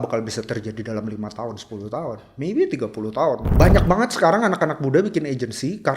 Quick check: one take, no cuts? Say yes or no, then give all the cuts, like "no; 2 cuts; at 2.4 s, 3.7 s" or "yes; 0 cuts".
no; 1 cut; at 3.5 s